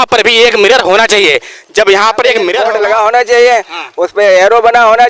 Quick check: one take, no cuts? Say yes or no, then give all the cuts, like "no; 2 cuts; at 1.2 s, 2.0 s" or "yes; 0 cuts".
no; 1 cut; at 2.6 s